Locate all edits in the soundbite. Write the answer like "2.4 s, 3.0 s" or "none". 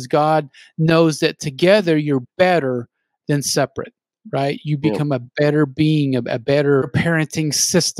6.9 s